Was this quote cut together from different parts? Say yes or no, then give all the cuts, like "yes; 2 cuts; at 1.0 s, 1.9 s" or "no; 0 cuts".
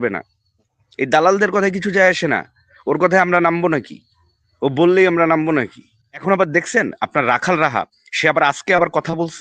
yes; 1 cut; at 6.2 s